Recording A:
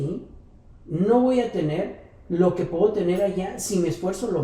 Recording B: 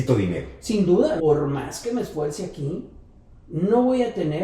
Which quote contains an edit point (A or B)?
B